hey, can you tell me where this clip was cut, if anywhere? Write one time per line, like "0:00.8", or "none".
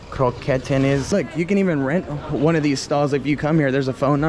0:01.1